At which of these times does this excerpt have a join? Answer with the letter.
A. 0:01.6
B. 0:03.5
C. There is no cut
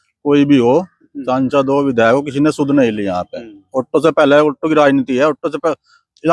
C